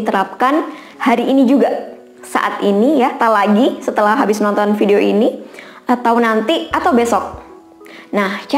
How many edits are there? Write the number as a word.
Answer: zero